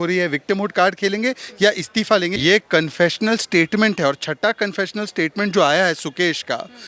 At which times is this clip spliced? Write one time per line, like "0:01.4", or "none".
0:02.4